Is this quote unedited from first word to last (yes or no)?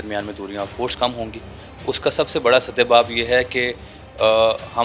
yes